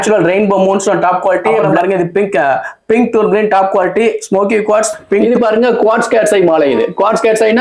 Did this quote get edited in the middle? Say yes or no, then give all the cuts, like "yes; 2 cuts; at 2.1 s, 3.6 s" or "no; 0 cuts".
yes; 2 cuts; at 1.6 s, 5.2 s